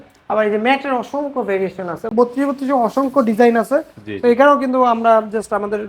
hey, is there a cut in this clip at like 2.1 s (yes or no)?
yes